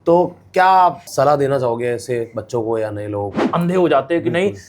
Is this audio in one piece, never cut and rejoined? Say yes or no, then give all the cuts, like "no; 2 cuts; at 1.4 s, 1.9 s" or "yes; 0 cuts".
no; 2 cuts; at 1.0 s, 3.4 s